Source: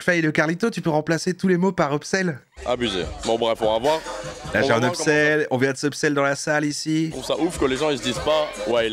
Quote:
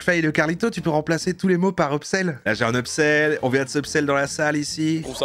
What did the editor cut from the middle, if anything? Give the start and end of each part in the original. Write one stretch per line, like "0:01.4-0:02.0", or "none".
0:02.5-0:04.6